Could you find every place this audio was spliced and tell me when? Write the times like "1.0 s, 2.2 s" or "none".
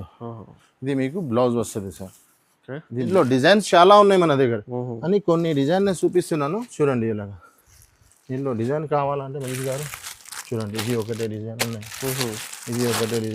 3.1 s